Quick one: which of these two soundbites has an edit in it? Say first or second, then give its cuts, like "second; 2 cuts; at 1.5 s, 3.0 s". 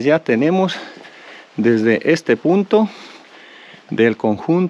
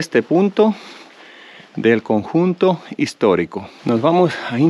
second; 1 cut; at 3.7 s